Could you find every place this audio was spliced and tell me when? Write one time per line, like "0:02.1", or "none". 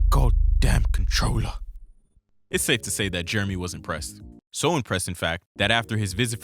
none